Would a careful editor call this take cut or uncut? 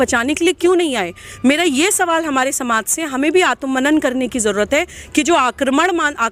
uncut